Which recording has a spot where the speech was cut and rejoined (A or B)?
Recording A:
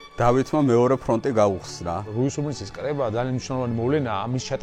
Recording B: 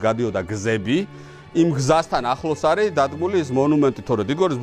A